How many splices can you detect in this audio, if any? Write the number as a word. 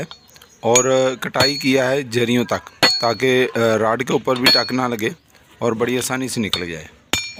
zero